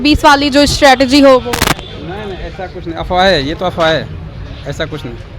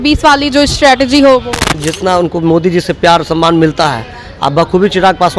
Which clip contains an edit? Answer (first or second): second